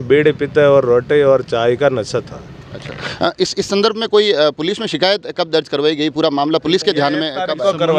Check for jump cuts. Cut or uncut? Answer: uncut